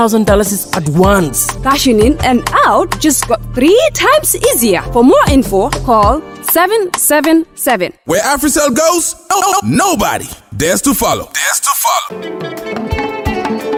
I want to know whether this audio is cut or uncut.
uncut